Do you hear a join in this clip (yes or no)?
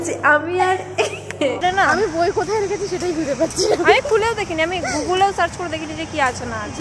yes